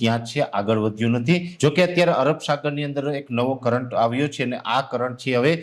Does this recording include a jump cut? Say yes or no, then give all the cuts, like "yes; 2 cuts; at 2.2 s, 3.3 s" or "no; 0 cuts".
yes; 1 cut; at 1.5 s